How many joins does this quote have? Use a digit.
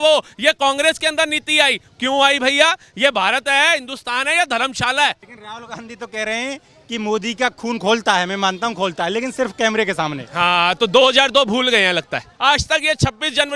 2